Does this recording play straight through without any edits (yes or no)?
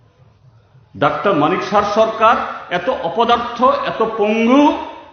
no